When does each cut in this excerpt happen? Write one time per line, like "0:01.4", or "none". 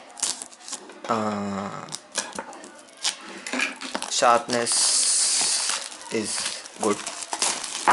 0:06.2